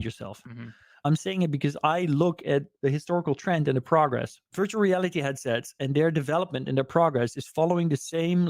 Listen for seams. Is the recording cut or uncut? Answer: cut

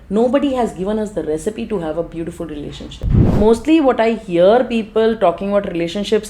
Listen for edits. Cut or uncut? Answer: cut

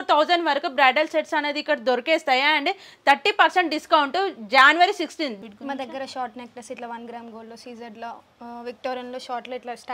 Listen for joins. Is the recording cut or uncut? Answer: cut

